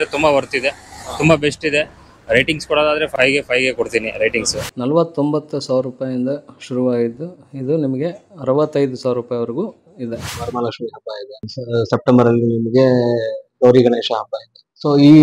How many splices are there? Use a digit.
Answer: 3